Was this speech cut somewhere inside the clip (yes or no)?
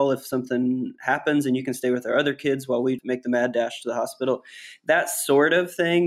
no